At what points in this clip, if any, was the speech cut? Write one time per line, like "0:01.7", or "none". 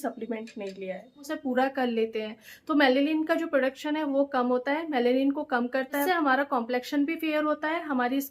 0:01.3
0:06.0